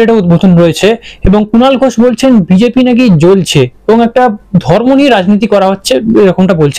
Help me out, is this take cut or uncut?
uncut